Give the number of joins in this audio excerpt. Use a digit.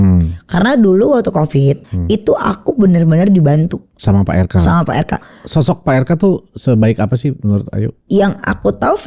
4